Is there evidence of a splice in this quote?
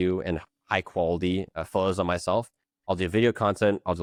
no; 0 cuts

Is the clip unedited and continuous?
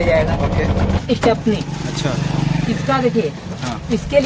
no; 1 cut; at 1.0 s

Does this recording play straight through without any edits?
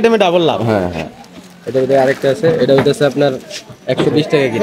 yes; 0 cuts

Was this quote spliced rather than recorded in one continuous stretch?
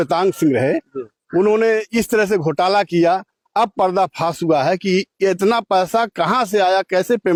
no; 0 cuts

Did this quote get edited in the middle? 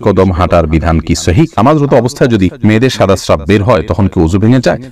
yes; 2 cuts; at 1.6 s, 2.5 s

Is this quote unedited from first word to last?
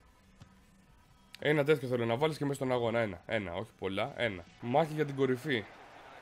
yes; 0 cuts

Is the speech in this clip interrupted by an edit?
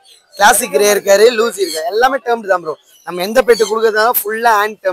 no; 0 cuts

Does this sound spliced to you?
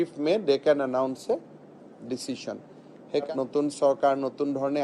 yes; 1 cut; at 3.3 s

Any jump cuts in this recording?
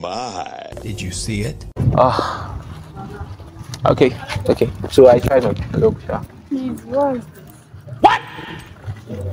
no; 0 cuts

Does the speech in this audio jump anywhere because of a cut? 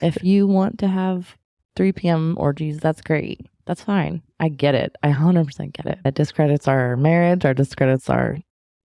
yes; 1 cut; at 6.1 s

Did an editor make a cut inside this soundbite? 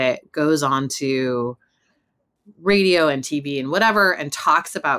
no; 0 cuts

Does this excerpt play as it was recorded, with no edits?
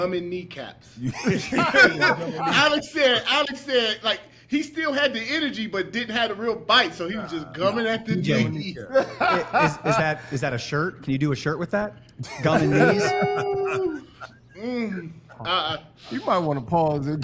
yes; 0 cuts

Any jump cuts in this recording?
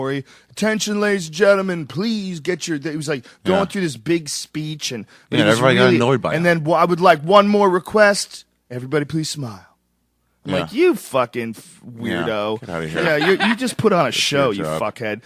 no; 0 cuts

